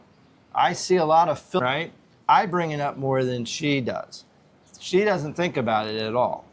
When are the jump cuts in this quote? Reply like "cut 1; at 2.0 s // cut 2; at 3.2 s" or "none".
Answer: cut 1; at 1.6 s

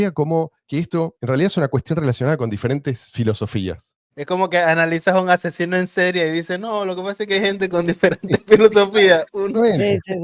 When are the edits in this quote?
cut 1; at 1.2 s // cut 2; at 3.9 s

